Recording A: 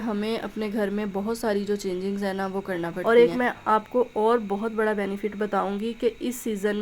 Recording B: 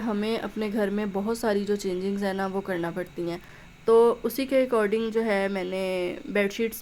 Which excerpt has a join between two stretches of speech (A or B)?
A